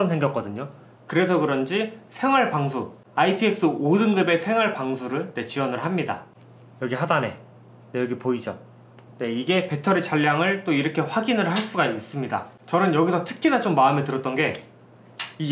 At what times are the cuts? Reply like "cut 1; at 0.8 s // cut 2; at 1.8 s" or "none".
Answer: cut 1; at 6.3 s // cut 2; at 12.5 s